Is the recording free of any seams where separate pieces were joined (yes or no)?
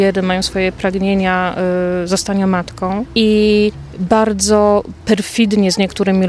no